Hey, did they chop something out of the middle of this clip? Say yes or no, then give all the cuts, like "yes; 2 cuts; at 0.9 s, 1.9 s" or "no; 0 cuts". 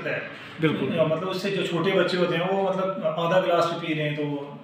no; 0 cuts